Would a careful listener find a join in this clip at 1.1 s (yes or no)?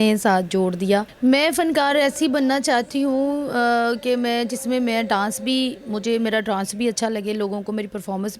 yes